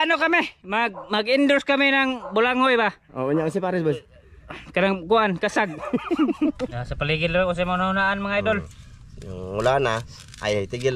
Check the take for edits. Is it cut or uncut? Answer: cut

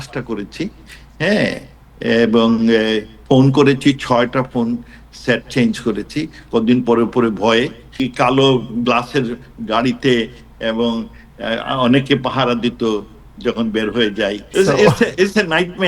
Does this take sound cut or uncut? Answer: cut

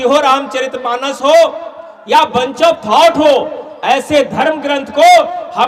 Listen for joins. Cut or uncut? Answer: uncut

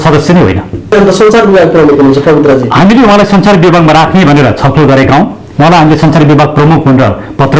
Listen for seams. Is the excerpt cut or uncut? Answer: cut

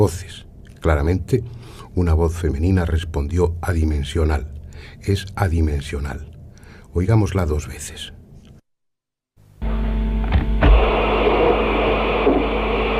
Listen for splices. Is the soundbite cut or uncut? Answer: uncut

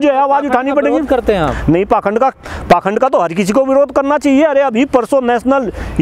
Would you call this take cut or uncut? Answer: uncut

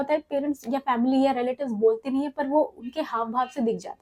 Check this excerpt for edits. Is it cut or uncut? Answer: uncut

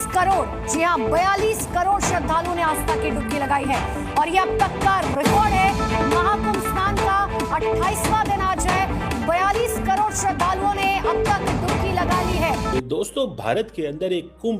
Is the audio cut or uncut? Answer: cut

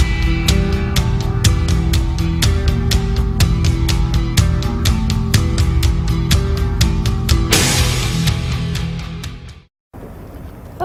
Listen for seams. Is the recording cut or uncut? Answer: uncut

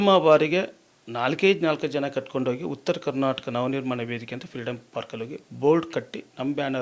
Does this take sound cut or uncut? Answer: uncut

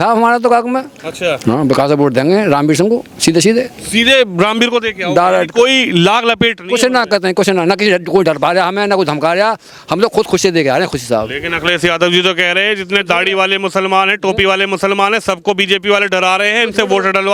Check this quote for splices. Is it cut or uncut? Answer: uncut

